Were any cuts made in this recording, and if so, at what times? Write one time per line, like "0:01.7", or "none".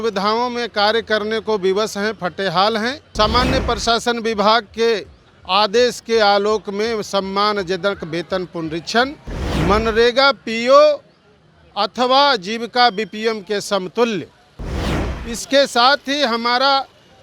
0:03.0